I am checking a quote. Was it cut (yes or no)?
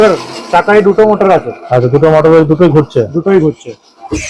no